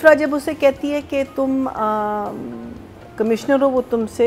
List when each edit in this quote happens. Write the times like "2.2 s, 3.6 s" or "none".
none